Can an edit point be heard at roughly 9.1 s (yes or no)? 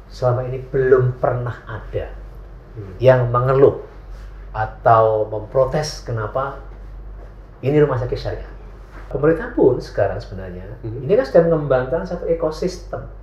yes